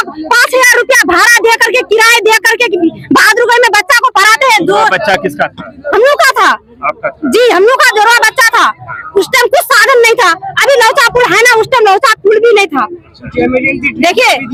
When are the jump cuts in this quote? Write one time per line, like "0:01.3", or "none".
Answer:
none